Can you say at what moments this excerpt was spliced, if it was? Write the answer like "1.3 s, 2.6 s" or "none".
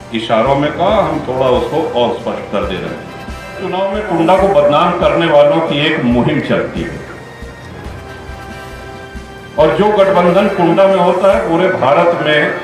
3.6 s